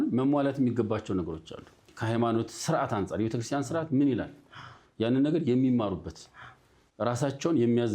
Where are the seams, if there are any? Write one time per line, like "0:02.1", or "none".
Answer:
0:01.9